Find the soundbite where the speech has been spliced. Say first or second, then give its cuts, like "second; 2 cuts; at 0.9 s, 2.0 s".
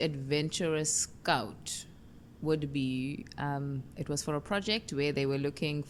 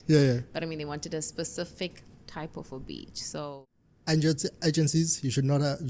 second; 1 cut; at 3.6 s